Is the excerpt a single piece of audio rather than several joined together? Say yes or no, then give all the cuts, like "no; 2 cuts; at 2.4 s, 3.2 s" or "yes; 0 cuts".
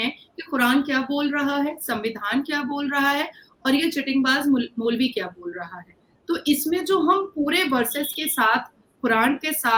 yes; 0 cuts